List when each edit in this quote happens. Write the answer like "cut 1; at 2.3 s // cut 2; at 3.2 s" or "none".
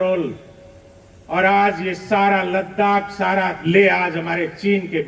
cut 1; at 3.6 s

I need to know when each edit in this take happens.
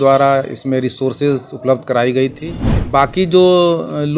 cut 1; at 2.8 s

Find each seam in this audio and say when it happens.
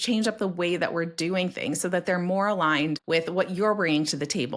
cut 1; at 3.0 s

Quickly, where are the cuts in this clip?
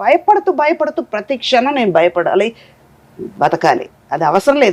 none

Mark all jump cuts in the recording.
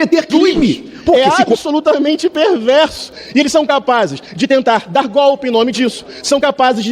cut 1; at 1.1 s

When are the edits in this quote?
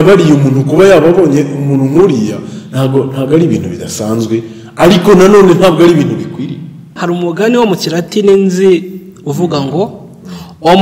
cut 1; at 6.9 s

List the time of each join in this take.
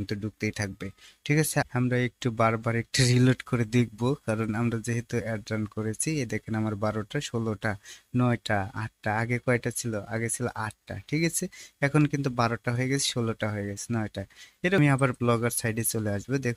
cut 1; at 1.7 s // cut 2; at 14.8 s

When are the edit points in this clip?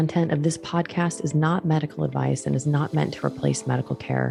none

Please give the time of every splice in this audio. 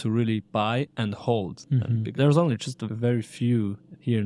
cut 1; at 2.1 s

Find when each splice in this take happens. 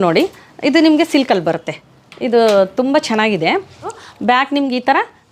cut 1; at 4.0 s

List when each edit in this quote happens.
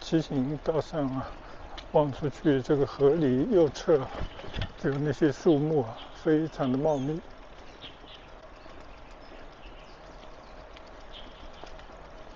none

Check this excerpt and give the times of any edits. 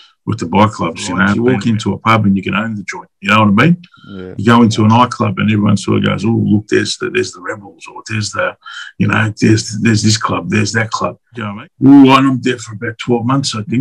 cut 1; at 1.4 s // cut 2; at 11.2 s

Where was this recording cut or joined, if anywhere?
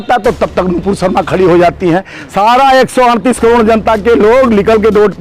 cut 1; at 2.2 s

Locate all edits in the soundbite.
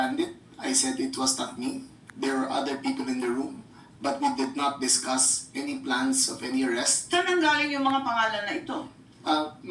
cut 1; at 1.2 s

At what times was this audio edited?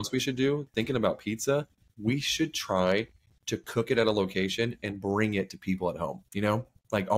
cut 1; at 6.2 s

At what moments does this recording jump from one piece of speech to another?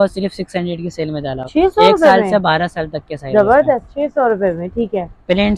none

